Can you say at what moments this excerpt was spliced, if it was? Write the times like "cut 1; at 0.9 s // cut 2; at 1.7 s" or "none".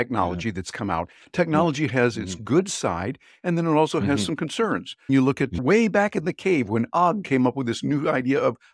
none